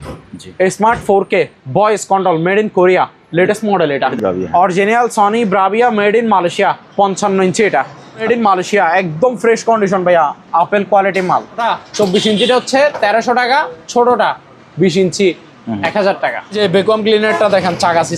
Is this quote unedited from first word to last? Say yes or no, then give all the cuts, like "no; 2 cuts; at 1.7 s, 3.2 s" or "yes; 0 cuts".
no; 4 cuts; at 4.1 s, 8.2 s, 11.6 s, 16.6 s